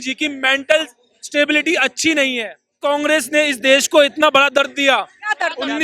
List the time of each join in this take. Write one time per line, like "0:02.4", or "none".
0:02.8